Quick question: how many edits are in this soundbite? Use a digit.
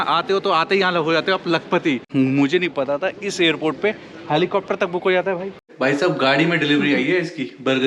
2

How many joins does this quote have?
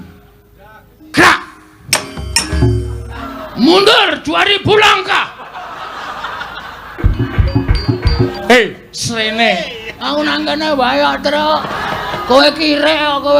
3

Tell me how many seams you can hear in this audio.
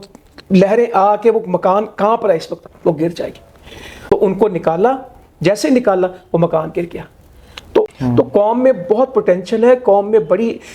2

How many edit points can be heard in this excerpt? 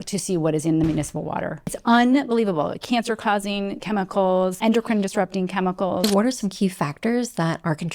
3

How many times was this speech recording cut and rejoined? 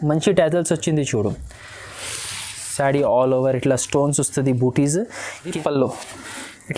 1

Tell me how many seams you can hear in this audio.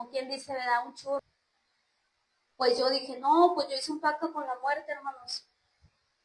1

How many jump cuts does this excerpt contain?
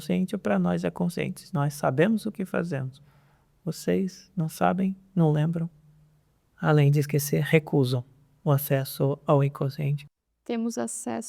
1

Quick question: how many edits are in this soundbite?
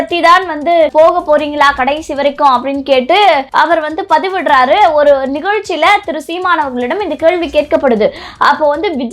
2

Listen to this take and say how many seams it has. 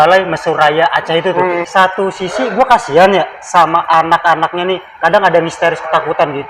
1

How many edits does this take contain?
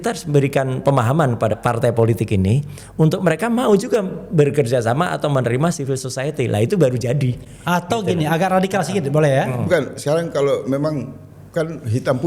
0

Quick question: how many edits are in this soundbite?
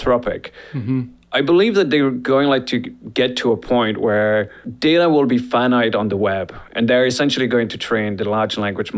1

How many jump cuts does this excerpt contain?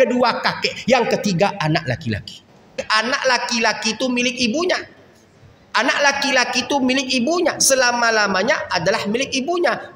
1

